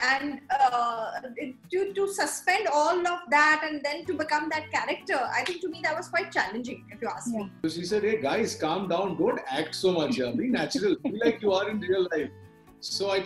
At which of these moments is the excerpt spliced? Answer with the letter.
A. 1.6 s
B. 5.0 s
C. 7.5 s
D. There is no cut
C